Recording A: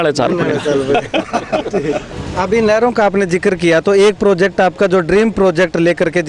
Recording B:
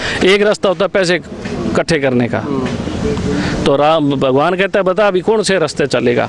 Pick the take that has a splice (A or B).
A